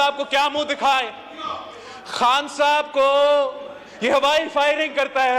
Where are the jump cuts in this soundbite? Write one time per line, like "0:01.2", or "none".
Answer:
none